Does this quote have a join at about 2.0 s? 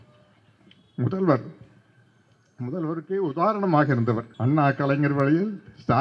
no; 1 cut; at 4.3 s

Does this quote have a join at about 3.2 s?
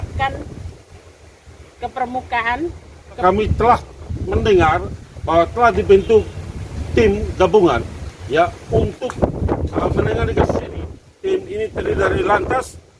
yes; 1 cut; at 3.2 s

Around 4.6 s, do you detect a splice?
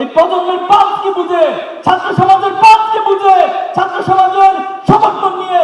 no; 0 cuts

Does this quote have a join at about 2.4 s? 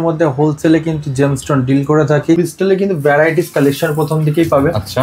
yes; 1 cut; at 2.4 s

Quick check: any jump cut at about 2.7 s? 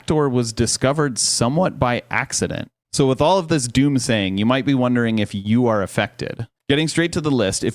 yes; 2 cuts; at 2.7 s, 6.5 s

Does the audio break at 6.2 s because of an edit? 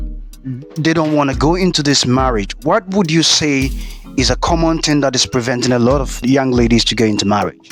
yes; 1 cut; at 6.2 s

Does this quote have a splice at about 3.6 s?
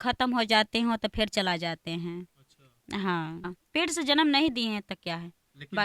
yes; 1 cut; at 3.6 s

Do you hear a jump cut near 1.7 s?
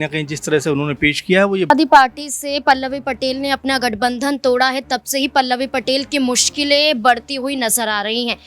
yes; 1 cut; at 1.7 s

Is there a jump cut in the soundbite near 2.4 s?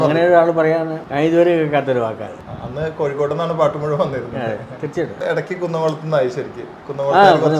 yes; 3 cuts; at 1.0 s, 2.4 s, 5.2 s

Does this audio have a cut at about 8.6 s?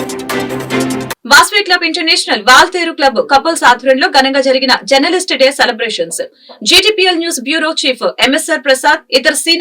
no; 1 cut; at 1.1 s

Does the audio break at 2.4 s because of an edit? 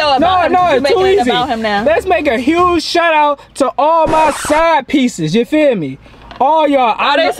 no; 0 cuts

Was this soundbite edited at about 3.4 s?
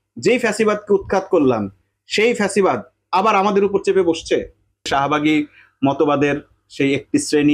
no; 1 cut; at 4.9 s

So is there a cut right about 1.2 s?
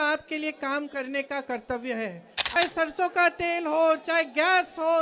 no; 1 cut; at 2.5 s

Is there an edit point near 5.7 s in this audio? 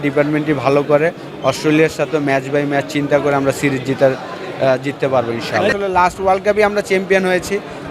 yes; 1 cut; at 5.7 s

